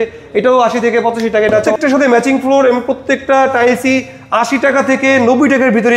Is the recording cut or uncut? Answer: cut